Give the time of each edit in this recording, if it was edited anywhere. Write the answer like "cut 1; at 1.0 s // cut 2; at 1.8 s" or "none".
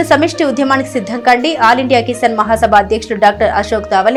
none